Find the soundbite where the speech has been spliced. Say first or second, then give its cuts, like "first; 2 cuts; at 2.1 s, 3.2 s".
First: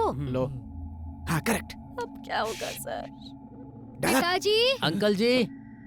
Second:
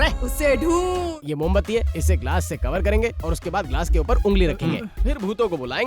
second; 1 cut; at 1.1 s